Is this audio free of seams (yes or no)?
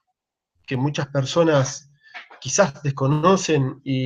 yes